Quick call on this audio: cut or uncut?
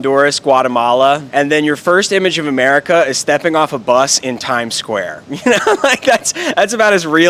cut